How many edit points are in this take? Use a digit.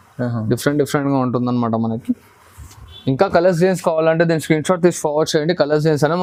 0